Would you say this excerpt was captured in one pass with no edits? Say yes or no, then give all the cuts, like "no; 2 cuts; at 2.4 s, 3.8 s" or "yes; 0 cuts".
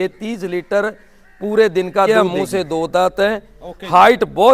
no; 1 cut; at 2.1 s